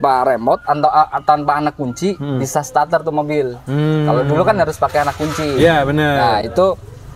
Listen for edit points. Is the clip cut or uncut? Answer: uncut